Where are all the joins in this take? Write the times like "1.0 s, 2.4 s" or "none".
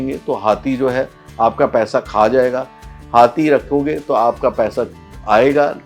2.8 s